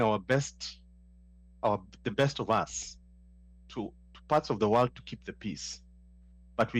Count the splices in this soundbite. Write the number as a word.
zero